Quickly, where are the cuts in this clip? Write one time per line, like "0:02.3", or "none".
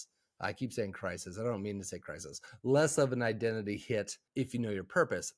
0:04.2